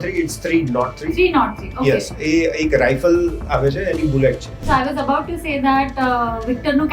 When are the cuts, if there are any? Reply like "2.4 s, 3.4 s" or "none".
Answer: 4.5 s